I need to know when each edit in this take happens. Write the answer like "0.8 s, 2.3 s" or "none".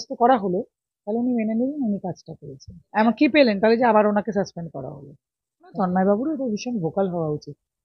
2.8 s, 5.7 s